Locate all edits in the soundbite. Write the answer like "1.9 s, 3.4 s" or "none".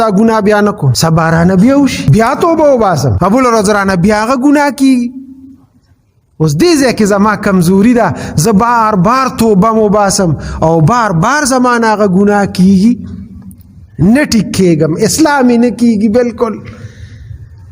0.9 s, 2.0 s, 3.1 s